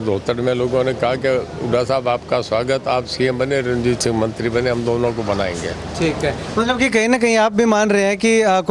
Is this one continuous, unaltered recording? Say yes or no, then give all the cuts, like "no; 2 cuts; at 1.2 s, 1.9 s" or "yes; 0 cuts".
yes; 0 cuts